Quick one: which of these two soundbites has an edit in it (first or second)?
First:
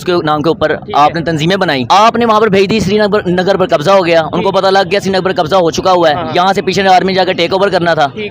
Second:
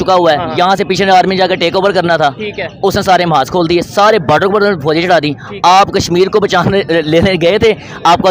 first